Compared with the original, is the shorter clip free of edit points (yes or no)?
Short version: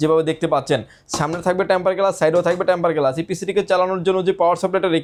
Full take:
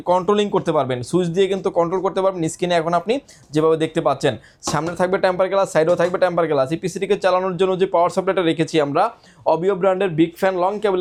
yes